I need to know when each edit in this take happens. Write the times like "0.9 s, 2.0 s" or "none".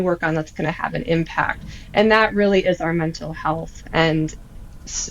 none